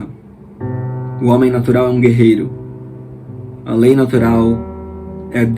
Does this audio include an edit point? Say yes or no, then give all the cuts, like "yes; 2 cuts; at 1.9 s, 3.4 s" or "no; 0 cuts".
no; 0 cuts